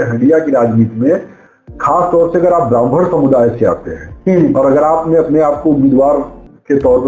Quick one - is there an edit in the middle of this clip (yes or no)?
no